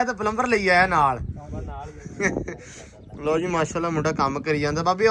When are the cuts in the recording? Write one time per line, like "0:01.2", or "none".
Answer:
none